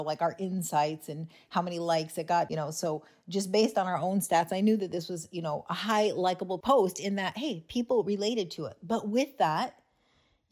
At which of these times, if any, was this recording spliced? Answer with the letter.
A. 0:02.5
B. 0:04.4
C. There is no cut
A